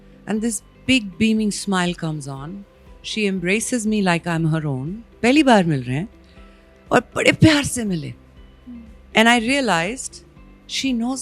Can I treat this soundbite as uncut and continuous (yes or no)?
yes